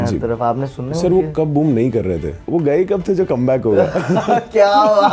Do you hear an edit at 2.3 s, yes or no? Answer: yes